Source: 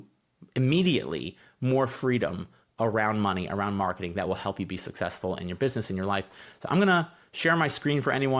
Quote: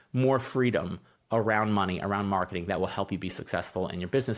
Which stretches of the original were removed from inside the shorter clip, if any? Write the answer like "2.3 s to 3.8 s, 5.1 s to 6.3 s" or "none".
none